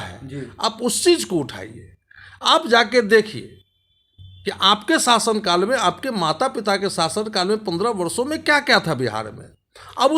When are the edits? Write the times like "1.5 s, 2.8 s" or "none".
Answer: none